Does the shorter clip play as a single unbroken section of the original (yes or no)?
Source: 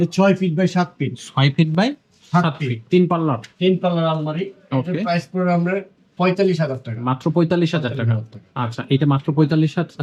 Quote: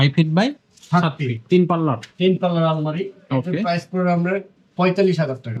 yes